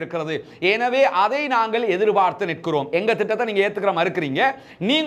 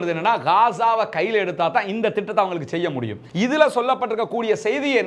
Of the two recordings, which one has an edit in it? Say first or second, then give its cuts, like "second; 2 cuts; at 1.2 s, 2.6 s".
second; 1 cut; at 3.2 s